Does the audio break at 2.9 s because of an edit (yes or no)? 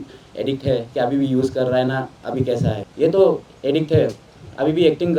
yes